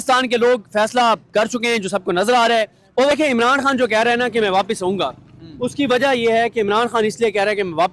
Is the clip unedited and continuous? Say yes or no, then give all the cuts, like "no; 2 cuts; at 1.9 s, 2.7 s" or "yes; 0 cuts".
no; 1 cut; at 3.1 s